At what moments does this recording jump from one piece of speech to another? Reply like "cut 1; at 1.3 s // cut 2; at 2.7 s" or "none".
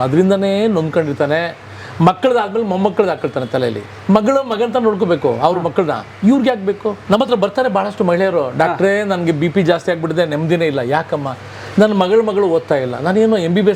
cut 1; at 3.9 s // cut 2; at 7.0 s